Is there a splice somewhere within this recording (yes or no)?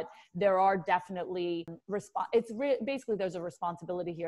yes